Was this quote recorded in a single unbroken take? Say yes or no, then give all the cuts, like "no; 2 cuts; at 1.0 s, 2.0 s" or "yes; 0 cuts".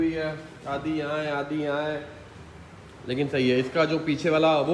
yes; 0 cuts